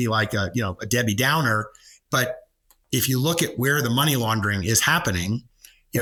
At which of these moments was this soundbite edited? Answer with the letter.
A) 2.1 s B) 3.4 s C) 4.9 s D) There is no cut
D